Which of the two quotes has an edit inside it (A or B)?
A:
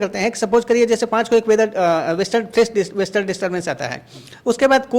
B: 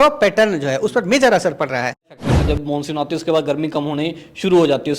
B